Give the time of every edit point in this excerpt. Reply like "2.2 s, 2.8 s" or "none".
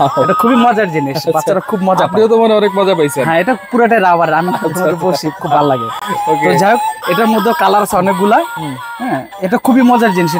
none